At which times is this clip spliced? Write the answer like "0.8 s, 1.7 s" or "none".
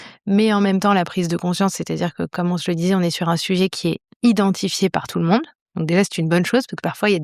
none